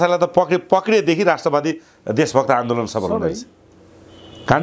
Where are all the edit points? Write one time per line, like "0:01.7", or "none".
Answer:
none